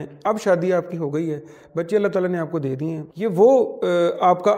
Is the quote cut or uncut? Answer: cut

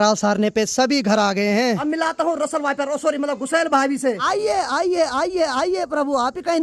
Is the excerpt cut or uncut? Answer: cut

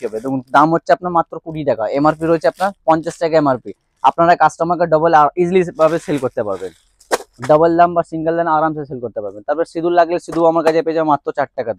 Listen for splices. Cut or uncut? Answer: uncut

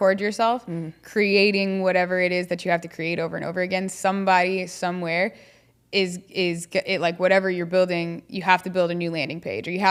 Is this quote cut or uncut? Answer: uncut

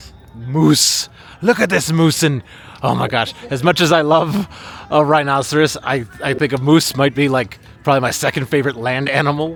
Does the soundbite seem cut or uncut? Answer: uncut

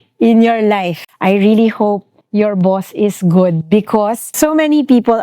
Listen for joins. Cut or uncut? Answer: cut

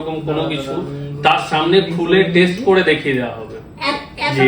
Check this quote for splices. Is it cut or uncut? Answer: uncut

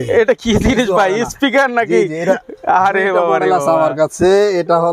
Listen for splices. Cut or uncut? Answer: uncut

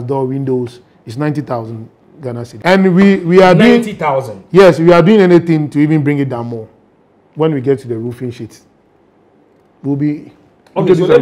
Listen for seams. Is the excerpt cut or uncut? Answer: cut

